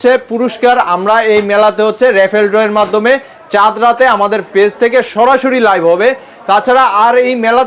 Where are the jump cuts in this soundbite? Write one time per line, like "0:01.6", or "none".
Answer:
none